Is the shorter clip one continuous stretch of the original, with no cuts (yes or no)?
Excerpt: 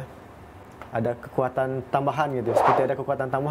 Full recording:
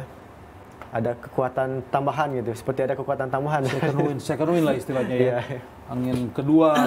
yes